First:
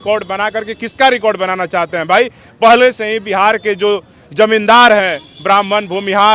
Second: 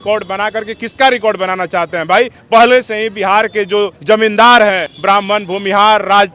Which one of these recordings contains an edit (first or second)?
second